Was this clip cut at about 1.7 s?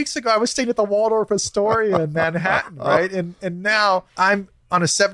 no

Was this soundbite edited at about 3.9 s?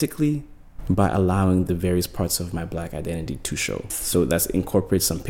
yes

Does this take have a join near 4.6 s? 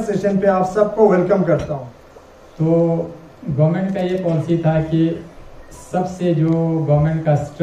no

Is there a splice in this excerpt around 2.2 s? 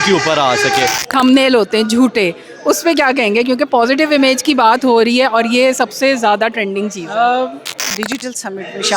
no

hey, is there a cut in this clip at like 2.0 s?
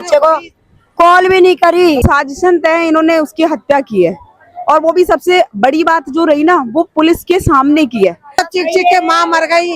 yes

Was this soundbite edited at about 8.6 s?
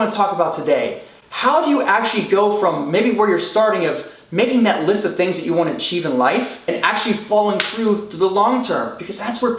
no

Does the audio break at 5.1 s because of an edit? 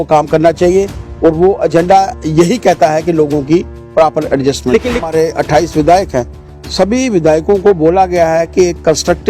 yes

